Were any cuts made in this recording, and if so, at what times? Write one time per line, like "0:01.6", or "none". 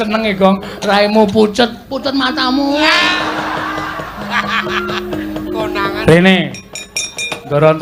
none